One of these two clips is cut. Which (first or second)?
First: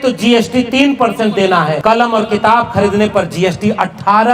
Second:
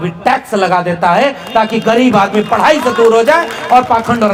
first